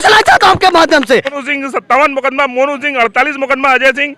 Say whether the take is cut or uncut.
cut